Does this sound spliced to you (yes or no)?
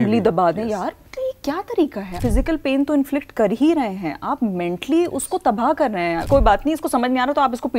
yes